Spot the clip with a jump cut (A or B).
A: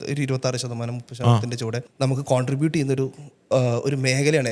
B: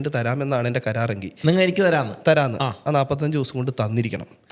A